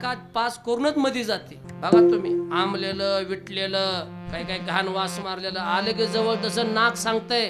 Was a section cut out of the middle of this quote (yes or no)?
yes